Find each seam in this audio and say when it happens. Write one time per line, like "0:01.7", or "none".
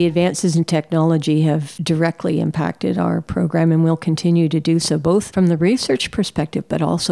0:01.7
0:05.3